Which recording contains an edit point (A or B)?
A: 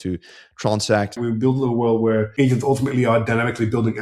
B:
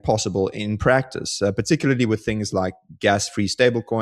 A